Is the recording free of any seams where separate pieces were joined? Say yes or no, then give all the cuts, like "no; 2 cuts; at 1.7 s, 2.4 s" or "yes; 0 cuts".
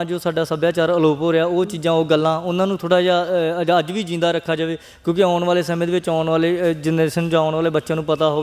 yes; 0 cuts